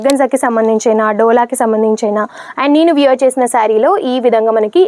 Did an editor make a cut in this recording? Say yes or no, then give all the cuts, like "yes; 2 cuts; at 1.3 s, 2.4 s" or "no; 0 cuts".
no; 0 cuts